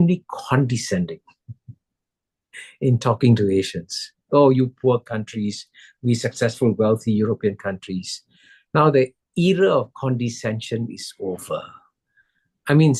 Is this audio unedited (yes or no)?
yes